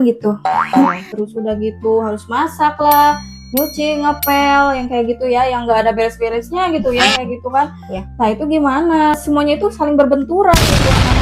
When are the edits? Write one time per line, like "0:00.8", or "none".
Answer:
0:01.1
0:09.2